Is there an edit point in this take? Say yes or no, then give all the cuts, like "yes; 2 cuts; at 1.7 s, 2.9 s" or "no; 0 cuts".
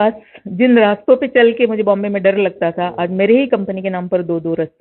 no; 0 cuts